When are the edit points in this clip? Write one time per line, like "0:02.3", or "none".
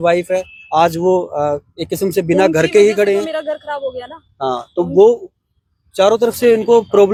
none